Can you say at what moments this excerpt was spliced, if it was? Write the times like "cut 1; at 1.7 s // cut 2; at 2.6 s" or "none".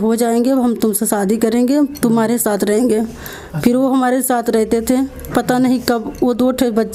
none